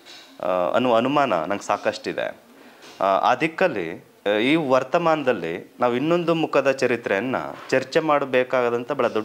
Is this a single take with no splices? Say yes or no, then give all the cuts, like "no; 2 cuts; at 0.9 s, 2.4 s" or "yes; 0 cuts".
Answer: yes; 0 cuts